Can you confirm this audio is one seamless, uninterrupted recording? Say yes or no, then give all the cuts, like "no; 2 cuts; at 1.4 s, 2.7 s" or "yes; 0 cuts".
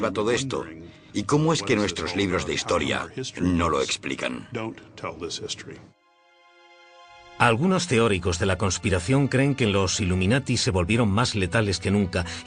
no; 1 cut; at 3.4 s